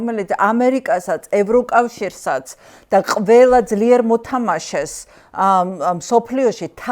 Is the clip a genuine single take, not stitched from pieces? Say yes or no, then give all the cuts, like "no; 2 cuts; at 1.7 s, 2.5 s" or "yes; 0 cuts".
yes; 0 cuts